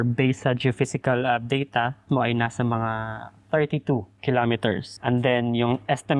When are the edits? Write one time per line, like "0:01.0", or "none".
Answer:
0:02.0
0:04.1
0:04.9